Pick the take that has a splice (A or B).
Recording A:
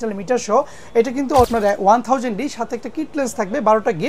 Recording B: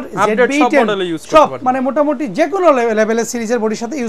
A